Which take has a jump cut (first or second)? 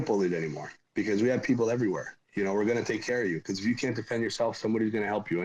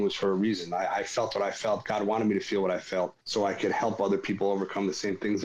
second